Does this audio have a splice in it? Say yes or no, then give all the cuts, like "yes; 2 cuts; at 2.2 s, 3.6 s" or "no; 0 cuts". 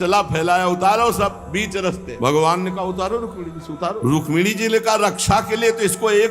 yes; 2 cuts; at 2.1 s, 4.0 s